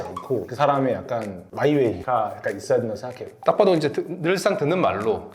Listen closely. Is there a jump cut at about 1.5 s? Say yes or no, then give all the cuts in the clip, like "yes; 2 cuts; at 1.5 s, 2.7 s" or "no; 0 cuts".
no; 1 cut; at 3.3 s